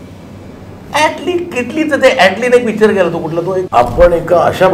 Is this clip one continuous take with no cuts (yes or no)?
no